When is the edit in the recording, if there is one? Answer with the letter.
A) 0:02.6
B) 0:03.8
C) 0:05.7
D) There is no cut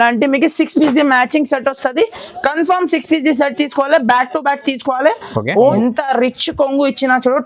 C